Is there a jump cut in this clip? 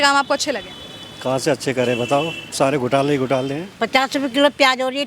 yes; 1 cut; at 3.6 s

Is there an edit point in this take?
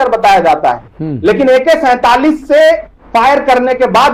no; 0 cuts

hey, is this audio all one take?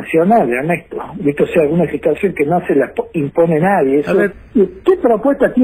no; 1 cut; at 4.3 s

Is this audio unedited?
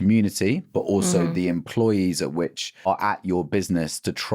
no; 1 cut; at 2.9 s

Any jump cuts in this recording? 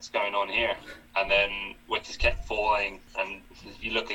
yes; 1 cut; at 3.2 s

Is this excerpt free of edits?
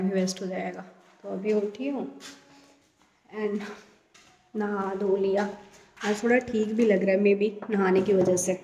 yes; 0 cuts

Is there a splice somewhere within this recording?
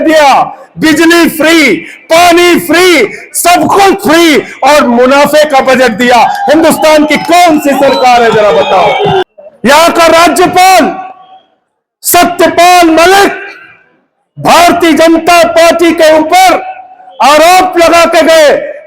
yes; 1 cut; at 9.3 s

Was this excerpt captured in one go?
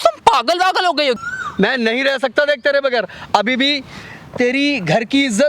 no; 1 cut; at 1.2 s

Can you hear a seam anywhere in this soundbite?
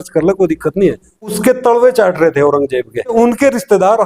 yes; 2 cuts; at 1.4 s, 3.1 s

